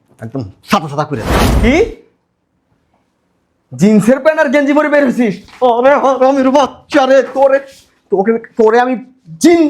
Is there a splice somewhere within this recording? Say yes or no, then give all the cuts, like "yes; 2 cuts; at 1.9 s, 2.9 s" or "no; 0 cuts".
yes; 1 cut; at 1.4 s